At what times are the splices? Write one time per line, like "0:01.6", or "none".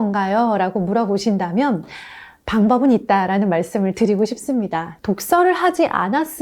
0:04.9